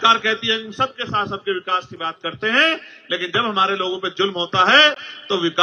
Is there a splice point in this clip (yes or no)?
no